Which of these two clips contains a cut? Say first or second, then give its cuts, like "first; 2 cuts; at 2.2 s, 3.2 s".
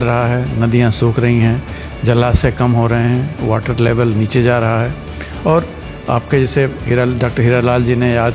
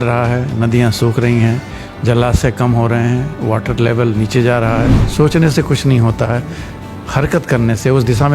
second; 1 cut; at 5.1 s